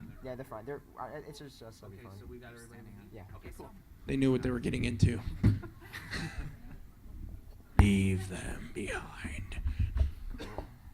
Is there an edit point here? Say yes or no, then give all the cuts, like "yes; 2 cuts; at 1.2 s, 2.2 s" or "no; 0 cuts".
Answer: yes; 1 cut; at 9.8 s